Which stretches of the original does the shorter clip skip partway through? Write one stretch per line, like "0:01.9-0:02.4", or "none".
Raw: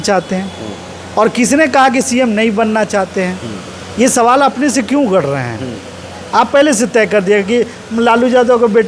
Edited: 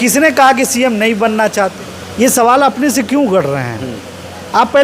0:03.1-0:03.6